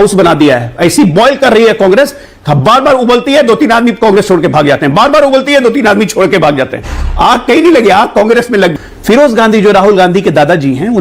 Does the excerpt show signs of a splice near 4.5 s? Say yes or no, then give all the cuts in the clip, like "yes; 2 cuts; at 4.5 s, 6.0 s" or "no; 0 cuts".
no; 1 cut; at 8.9 s